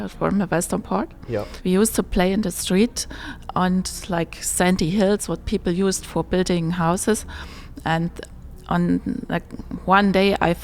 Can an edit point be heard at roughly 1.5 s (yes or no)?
yes